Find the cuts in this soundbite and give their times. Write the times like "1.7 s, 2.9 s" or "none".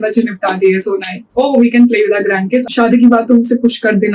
2.7 s